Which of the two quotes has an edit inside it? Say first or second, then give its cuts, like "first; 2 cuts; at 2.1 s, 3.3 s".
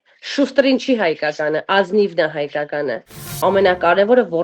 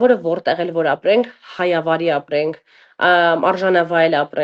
first; 1 cut; at 3.1 s